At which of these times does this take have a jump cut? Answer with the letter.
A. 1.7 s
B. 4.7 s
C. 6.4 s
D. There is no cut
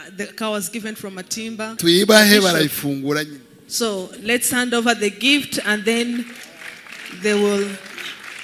A